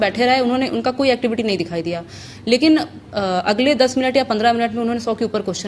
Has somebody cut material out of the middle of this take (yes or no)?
no